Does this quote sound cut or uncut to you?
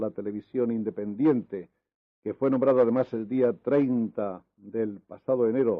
cut